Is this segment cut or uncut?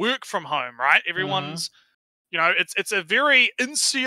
uncut